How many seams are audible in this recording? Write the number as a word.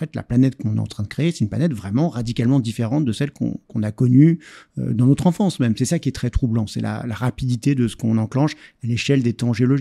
zero